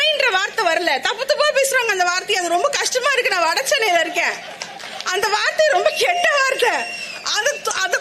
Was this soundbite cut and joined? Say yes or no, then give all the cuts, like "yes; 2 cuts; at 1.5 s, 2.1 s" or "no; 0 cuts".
no; 0 cuts